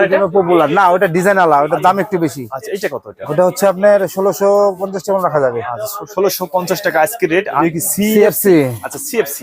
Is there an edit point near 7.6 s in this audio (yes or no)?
yes